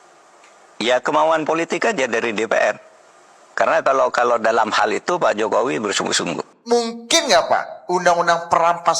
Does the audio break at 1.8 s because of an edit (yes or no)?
no